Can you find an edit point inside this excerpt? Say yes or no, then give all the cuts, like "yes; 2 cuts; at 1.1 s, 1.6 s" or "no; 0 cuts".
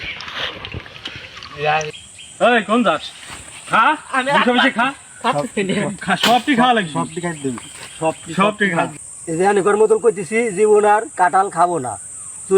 yes; 2 cuts; at 2.0 s, 9.1 s